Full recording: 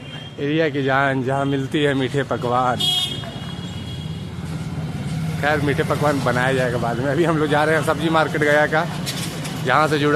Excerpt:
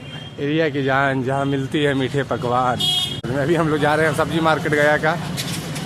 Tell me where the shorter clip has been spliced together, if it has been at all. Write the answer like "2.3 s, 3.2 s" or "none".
3.3 s